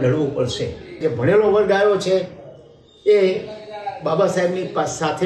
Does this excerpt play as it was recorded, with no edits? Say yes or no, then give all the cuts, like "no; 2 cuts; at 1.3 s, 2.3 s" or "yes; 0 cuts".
no; 1 cut; at 1.0 s